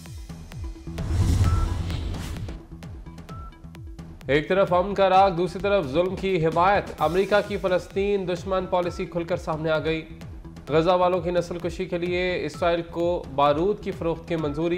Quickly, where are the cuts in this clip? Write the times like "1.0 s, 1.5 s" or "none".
1.0 s